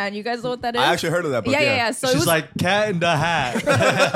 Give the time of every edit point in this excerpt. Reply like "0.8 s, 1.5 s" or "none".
none